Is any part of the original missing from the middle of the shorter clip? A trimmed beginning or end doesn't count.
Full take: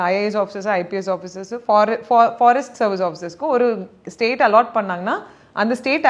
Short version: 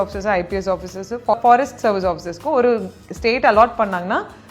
yes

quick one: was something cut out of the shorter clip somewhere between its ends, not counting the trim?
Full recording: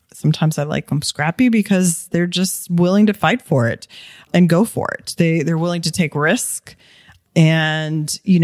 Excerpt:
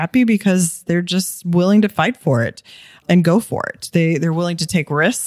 no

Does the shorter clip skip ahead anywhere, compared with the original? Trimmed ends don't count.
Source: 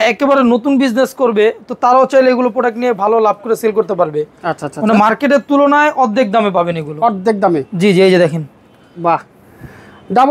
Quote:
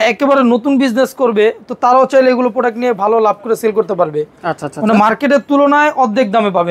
no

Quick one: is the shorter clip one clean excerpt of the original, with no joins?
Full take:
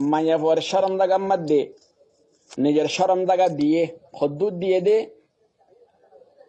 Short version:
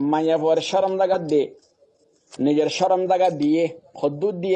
no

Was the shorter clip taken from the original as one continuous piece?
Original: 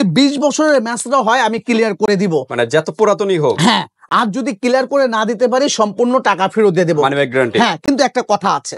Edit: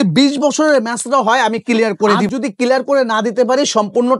no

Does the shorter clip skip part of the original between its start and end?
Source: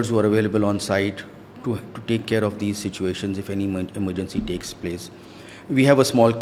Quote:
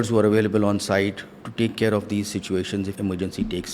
yes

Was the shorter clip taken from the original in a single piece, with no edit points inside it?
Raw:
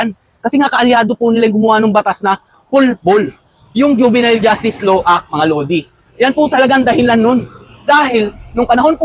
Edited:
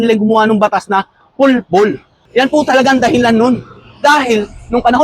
no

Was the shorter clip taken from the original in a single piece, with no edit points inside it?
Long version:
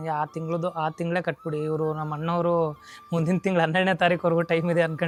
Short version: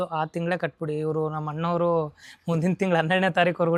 yes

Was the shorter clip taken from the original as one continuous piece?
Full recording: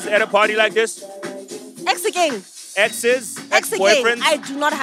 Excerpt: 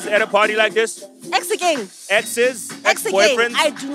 no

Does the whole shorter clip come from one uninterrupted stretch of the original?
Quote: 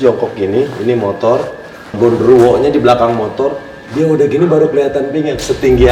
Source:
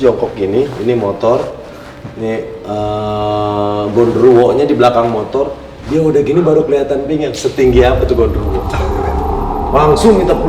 no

